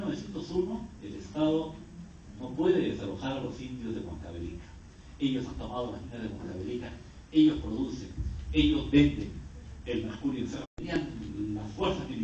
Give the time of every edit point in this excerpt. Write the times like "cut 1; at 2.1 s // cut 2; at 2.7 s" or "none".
none